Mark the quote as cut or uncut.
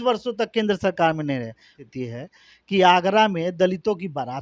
cut